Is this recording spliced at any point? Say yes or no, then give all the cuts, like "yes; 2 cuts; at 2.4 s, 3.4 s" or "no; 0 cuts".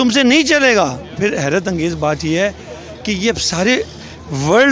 yes; 1 cut; at 1.2 s